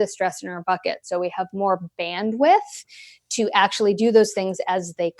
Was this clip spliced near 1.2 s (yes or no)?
no